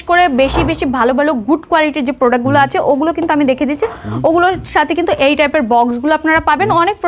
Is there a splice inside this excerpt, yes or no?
no